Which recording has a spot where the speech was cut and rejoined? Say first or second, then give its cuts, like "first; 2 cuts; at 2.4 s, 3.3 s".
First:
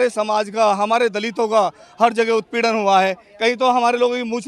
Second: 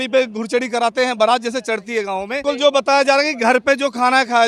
second; 1 cut; at 2.4 s